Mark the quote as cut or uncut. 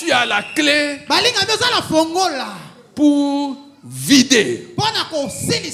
uncut